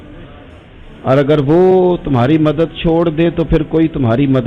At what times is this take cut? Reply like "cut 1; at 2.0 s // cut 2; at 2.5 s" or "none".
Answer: none